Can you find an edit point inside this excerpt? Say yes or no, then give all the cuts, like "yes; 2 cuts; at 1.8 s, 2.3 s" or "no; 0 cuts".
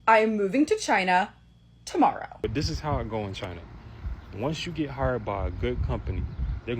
yes; 1 cut; at 2.4 s